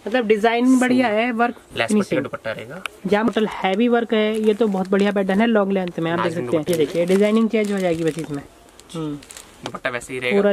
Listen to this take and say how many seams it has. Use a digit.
2